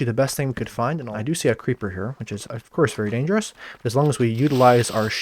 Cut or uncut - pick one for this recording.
cut